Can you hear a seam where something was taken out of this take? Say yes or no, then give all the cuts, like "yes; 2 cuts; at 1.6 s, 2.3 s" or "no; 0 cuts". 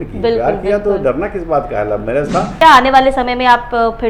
yes; 1 cut; at 2.5 s